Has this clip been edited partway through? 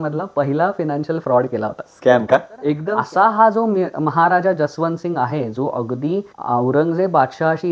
yes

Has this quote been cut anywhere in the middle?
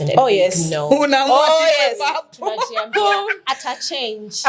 no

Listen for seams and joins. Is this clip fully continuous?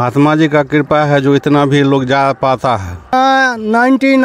no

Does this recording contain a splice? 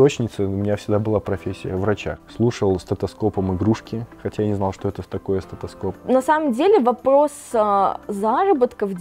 yes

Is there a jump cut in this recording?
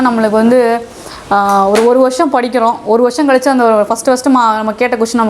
no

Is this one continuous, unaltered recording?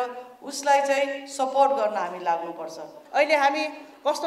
no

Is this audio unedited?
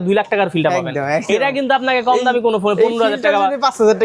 yes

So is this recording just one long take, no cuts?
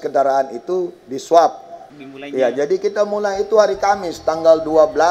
no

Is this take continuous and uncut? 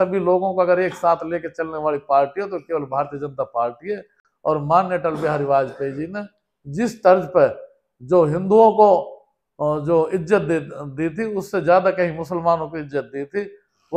yes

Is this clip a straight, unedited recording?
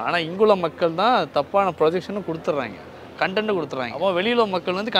no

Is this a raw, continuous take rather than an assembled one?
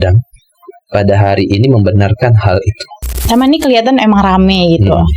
no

